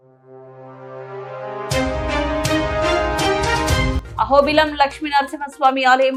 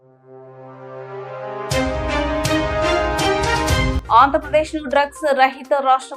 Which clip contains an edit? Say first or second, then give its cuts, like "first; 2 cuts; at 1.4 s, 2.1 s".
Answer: second; 1 cut; at 3.9 s